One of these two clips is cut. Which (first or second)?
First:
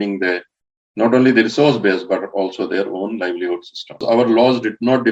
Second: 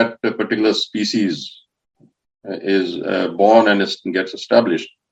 first